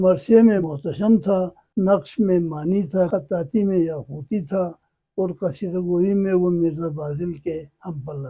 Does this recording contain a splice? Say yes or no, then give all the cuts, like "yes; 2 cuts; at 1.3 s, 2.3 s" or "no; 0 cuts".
yes; 2 cuts; at 1.2 s, 3.1 s